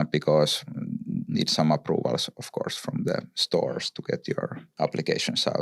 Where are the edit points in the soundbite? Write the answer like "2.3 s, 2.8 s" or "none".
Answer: 4.6 s

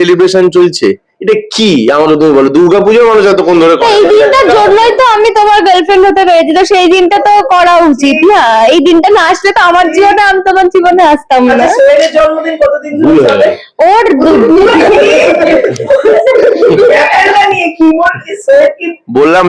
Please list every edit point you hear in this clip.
none

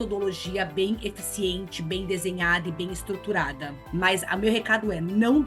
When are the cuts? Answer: 3.8 s

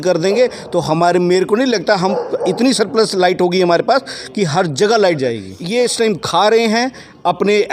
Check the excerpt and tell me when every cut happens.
5.5 s

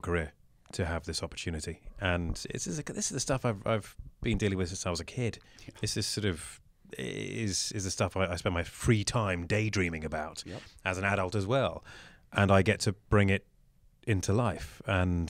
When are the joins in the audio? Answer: 1.9 s

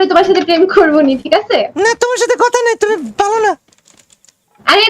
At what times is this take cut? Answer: none

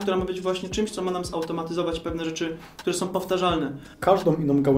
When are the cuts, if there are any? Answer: 3.8 s

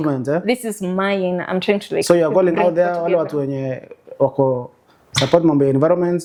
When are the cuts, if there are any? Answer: none

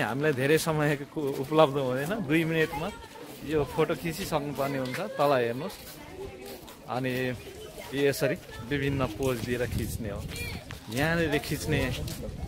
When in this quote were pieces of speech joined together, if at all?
none

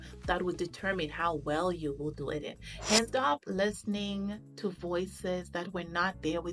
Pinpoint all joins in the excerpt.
3.1 s

